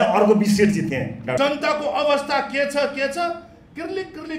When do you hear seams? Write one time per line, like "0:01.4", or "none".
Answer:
0:01.4